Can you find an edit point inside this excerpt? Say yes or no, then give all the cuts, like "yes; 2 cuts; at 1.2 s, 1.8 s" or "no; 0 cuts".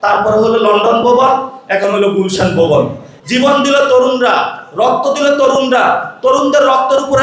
yes; 1 cut; at 3.1 s